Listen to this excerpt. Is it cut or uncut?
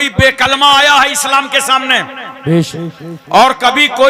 uncut